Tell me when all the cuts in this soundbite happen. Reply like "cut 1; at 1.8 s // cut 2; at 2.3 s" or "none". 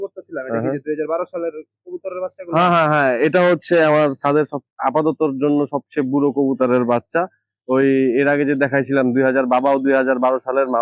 none

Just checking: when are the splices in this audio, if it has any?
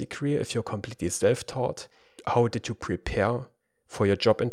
cut 1; at 2.2 s

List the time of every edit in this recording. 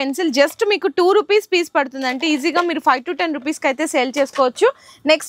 none

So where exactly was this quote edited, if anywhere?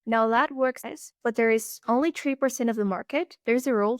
cut 1; at 0.9 s

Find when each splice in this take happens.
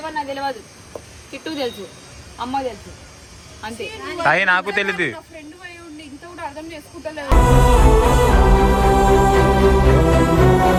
none

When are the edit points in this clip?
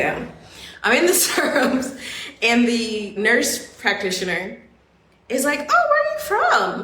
cut 1; at 3.1 s

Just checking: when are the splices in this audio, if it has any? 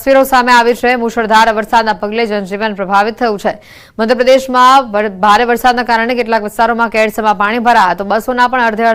none

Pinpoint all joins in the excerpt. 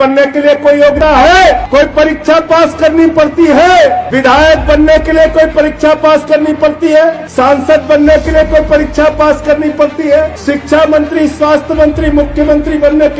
cut 1; at 1.0 s // cut 2; at 1.6 s // cut 3; at 4.1 s // cut 4; at 7.2 s // cut 5; at 10.4 s

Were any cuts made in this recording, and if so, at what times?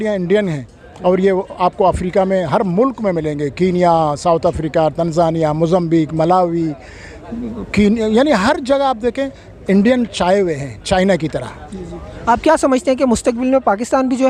none

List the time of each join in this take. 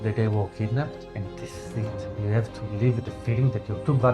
cut 1; at 1.0 s

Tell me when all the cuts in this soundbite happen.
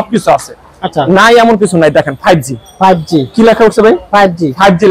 none

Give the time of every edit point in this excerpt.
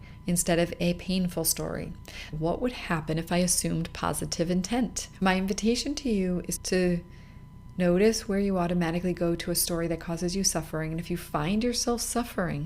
cut 1; at 2.2 s // cut 2; at 5.2 s // cut 3; at 6.5 s

